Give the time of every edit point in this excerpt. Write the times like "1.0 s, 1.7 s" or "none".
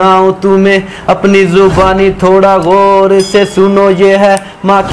none